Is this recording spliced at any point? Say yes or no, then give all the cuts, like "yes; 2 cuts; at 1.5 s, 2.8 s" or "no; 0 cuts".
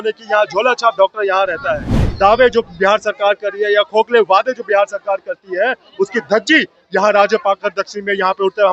yes; 1 cut; at 2.0 s